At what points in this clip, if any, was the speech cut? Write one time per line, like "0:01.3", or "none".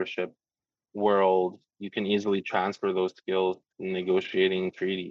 0:03.7